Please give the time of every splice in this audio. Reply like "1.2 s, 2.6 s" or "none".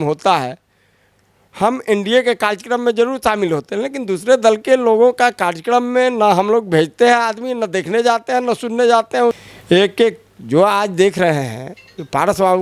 9.4 s